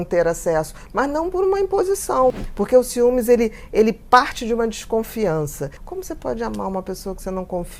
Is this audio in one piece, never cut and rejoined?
no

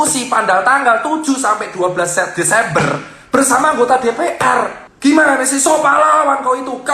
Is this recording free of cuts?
no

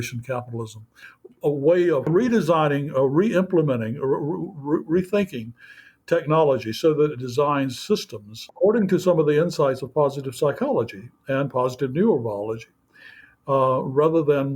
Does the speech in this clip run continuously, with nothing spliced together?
no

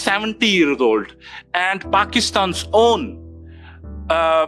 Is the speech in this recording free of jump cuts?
yes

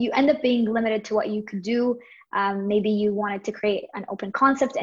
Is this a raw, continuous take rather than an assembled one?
yes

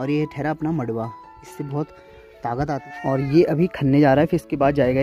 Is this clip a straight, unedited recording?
no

